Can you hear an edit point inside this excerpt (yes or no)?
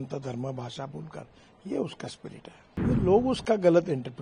yes